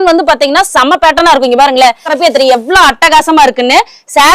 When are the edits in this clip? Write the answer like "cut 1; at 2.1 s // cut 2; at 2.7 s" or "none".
cut 1; at 2.1 s